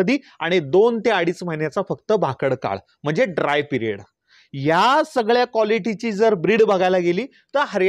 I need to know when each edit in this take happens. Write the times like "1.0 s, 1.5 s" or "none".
none